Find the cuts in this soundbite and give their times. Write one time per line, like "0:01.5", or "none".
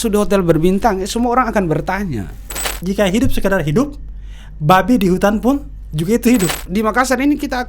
0:02.8
0:06.6